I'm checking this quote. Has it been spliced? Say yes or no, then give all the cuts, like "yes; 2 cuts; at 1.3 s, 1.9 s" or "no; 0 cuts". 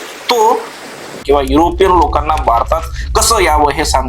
yes; 1 cut; at 1.2 s